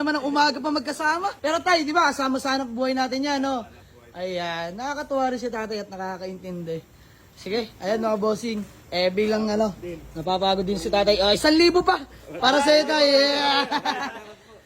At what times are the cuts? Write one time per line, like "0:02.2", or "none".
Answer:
0:01.4